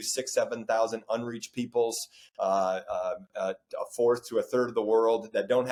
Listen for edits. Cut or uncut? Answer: uncut